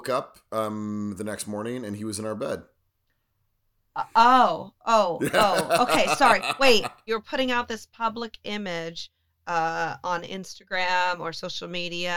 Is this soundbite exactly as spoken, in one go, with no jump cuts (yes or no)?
no